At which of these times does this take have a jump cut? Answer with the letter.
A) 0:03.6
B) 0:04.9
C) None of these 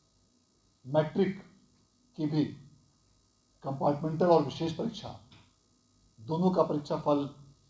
C